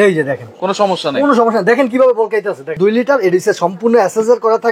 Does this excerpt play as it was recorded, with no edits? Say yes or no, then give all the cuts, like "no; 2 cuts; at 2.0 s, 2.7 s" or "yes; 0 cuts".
no; 1 cut; at 2.8 s